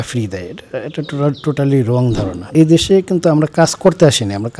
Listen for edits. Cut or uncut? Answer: cut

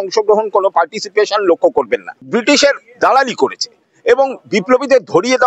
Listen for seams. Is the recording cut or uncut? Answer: cut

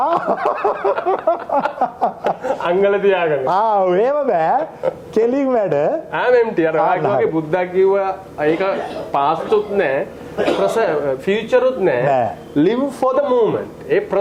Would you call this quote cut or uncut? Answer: uncut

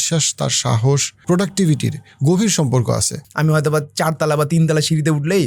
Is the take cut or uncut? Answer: cut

